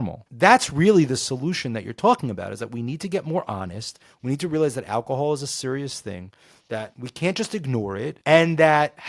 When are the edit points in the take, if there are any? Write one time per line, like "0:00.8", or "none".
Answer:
none